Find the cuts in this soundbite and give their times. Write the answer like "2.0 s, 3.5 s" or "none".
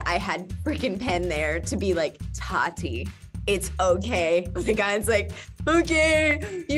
4.6 s